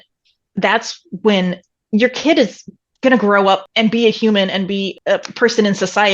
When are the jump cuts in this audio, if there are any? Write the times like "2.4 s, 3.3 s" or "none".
1.8 s, 3.7 s, 4.9 s